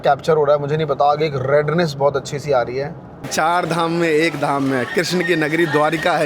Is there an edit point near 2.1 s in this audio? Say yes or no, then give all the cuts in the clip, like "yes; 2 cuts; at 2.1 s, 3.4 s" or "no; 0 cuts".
no; 1 cut; at 3.3 s